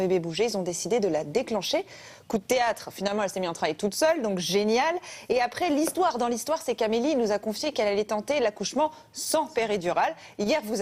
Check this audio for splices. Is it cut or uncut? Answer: uncut